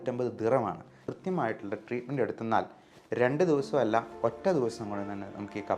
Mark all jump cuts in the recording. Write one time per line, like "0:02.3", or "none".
0:01.0